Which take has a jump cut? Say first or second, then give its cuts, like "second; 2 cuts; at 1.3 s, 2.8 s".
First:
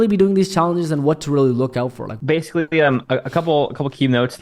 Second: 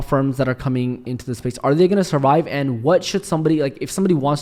first; 1 cut; at 2.1 s